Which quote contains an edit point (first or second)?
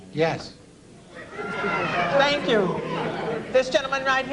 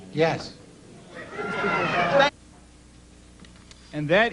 first